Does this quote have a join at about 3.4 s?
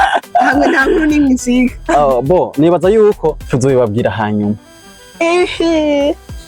yes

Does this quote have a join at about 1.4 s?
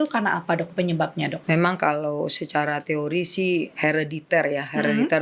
yes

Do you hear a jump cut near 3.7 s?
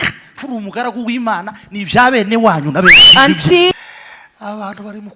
yes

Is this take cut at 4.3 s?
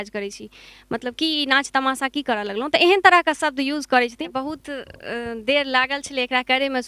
yes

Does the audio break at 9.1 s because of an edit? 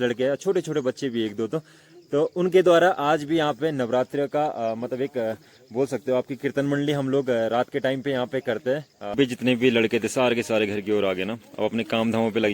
yes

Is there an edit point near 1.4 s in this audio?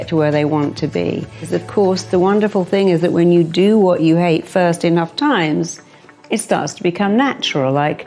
yes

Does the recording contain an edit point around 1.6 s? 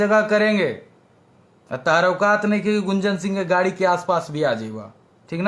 no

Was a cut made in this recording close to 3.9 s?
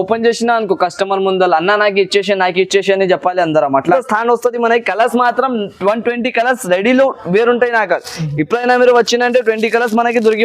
yes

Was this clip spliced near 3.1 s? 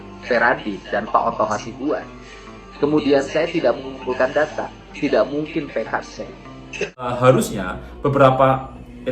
no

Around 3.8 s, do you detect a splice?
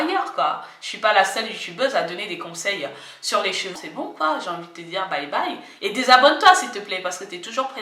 yes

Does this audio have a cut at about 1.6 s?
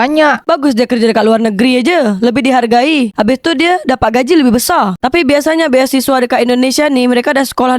no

